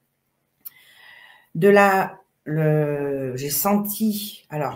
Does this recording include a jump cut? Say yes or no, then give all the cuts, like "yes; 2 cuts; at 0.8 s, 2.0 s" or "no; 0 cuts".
no; 0 cuts